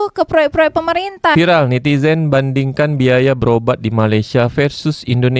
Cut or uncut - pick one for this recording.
cut